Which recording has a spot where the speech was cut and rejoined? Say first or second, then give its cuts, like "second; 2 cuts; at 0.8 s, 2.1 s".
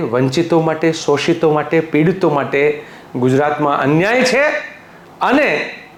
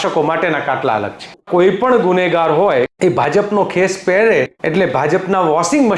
second; 3 cuts; at 1.5 s, 2.9 s, 4.6 s